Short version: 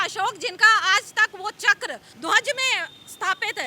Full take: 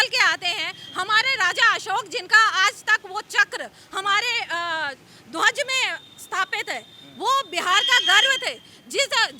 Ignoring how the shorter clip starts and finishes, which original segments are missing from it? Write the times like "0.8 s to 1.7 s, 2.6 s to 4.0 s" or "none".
3.8 s to 5.2 s